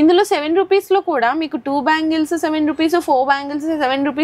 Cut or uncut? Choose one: uncut